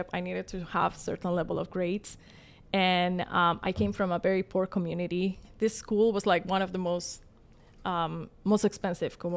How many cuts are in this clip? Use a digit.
1